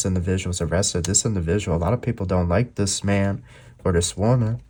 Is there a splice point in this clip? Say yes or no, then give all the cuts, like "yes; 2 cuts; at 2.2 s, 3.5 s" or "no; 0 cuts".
no; 0 cuts